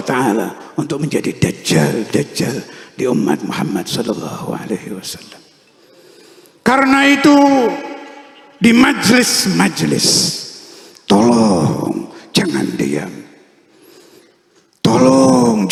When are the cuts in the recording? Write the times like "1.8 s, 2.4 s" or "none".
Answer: none

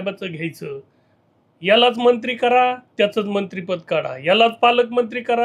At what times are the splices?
none

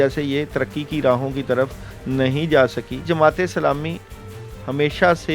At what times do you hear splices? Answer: 3.0 s

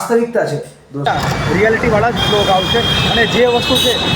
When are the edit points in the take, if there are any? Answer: 1.0 s

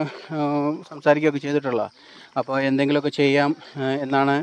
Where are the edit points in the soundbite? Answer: none

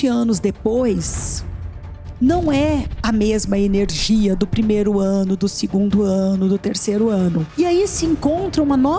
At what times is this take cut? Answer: none

